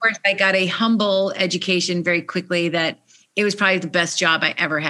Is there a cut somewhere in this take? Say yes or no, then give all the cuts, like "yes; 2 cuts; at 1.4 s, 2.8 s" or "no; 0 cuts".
no; 0 cuts